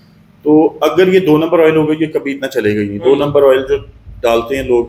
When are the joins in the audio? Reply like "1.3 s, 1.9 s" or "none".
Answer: none

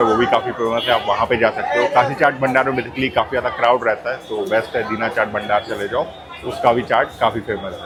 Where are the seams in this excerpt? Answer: none

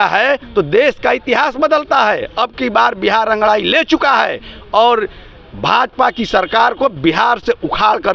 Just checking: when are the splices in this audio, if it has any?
none

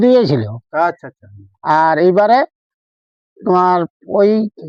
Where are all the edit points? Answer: none

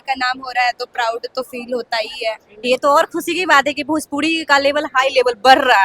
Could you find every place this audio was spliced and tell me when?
2.7 s

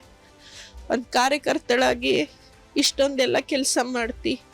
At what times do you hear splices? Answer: 3.1 s

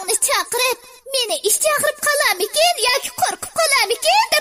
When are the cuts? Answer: 0.9 s

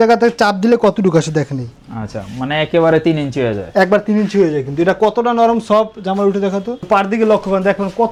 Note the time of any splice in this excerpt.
none

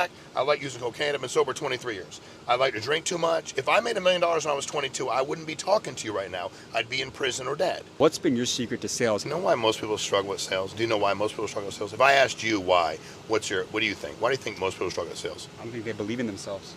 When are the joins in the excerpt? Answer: 7.9 s, 9.2 s

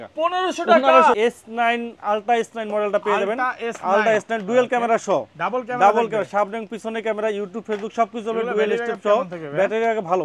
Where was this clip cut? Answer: 1.2 s

